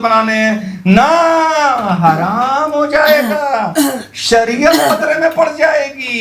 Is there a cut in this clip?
no; 0 cuts

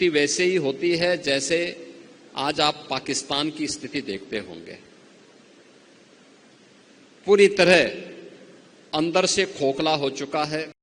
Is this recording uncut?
yes; 0 cuts

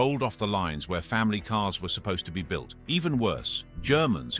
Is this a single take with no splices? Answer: no; 1 cut; at 1.7 s

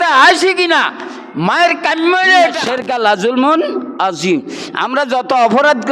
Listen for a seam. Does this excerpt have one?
yes; 1 cut; at 2.6 s

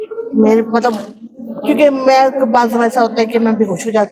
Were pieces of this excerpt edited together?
no; 0 cuts

